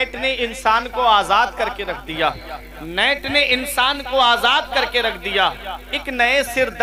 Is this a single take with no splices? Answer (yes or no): yes